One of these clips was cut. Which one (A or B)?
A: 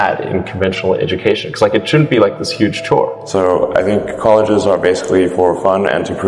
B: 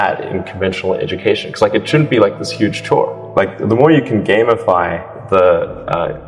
A